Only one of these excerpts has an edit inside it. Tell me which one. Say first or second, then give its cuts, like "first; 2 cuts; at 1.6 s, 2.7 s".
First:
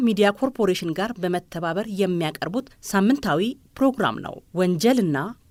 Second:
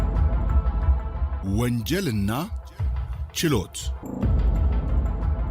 second; 2 cuts; at 1.4 s, 3.9 s